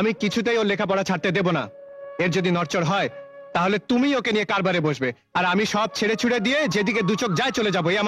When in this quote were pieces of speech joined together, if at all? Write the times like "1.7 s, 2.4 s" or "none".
none